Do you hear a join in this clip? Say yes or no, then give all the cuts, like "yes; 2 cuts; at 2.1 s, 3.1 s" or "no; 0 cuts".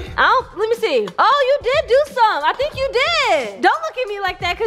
no; 0 cuts